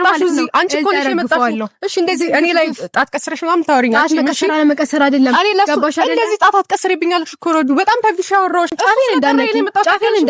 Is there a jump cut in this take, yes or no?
yes